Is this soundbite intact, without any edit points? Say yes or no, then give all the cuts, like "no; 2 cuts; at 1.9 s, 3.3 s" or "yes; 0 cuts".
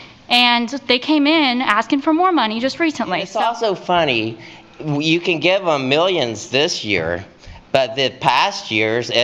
no; 1 cut; at 3.3 s